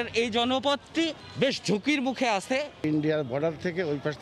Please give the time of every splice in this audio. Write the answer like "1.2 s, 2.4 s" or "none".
none